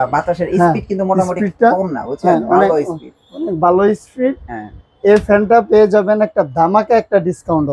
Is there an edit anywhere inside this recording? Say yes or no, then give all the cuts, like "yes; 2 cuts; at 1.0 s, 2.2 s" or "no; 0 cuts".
no; 0 cuts